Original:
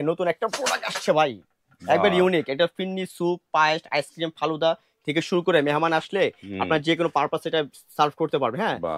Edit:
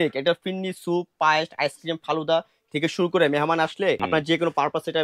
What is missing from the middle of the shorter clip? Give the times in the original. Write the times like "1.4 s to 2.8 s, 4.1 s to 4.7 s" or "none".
6.4 s to 6.6 s